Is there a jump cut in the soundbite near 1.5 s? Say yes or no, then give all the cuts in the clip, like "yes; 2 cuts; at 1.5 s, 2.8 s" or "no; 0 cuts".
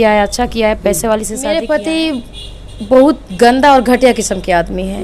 yes; 1 cut; at 1.5 s